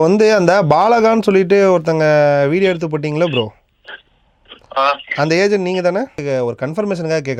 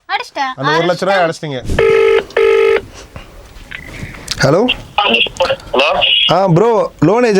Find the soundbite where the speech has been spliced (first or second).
second